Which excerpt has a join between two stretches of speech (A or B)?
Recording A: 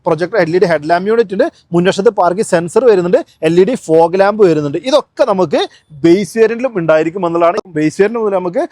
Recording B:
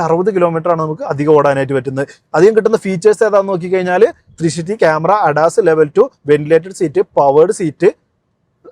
A